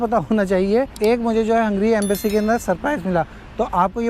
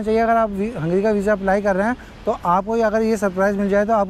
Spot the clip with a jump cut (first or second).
first